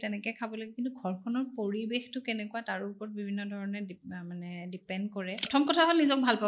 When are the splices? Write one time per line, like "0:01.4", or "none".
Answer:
0:05.4